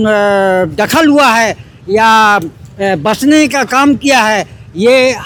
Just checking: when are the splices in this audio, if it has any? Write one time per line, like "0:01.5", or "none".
none